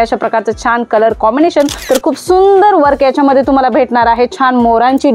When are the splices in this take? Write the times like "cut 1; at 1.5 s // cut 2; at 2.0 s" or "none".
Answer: cut 1; at 1.7 s